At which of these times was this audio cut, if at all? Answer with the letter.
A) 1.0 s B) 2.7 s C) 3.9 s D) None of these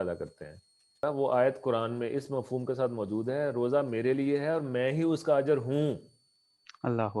A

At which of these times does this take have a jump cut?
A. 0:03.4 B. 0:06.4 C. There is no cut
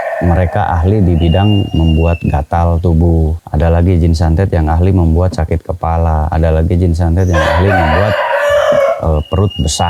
A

